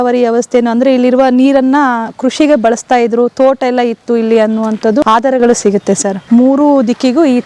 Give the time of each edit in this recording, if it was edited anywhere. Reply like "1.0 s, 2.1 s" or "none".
5.0 s, 6.2 s